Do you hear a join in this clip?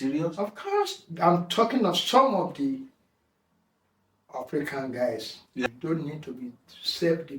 yes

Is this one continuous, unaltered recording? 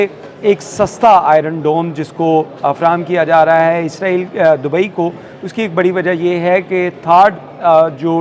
yes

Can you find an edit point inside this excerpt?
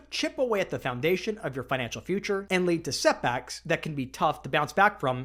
no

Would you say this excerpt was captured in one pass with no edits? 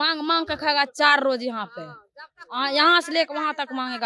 yes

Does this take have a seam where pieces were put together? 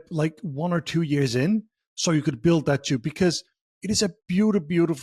no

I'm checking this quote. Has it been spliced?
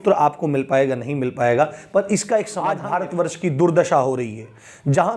yes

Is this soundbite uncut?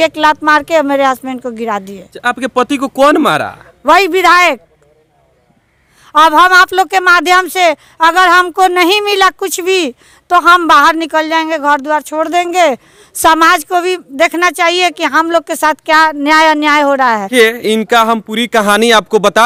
yes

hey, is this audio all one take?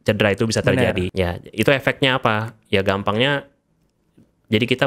no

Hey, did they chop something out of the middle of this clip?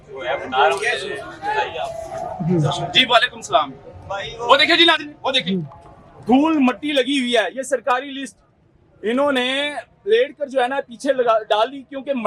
no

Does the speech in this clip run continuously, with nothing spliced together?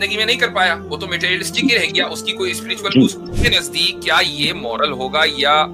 no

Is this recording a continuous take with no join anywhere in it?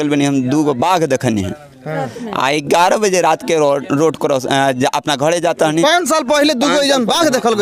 yes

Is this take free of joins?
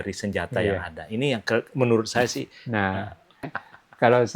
no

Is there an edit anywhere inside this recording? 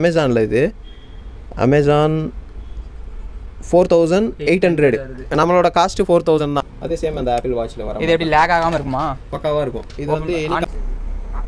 yes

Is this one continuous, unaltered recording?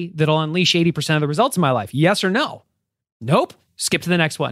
yes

